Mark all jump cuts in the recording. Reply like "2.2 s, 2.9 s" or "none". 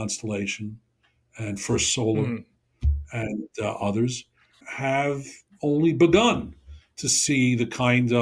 4.7 s